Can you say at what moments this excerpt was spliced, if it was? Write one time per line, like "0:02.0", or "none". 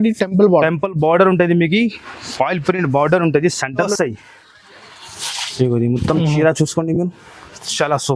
0:03.9